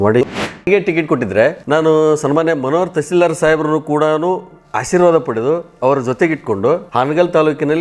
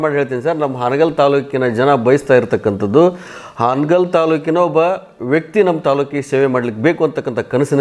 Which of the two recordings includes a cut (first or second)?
first